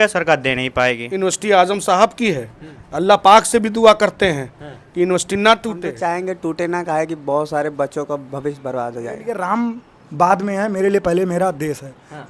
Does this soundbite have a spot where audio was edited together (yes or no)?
yes